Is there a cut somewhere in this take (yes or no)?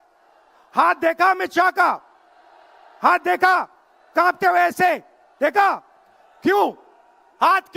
no